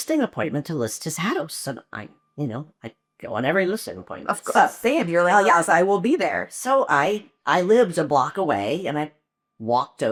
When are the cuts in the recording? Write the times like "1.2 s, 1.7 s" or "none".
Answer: none